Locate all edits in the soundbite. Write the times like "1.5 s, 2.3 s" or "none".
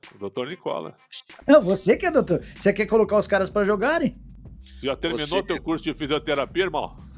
1.4 s